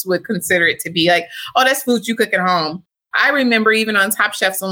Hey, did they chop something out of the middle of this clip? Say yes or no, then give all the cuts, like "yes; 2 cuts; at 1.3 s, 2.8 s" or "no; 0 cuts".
no; 0 cuts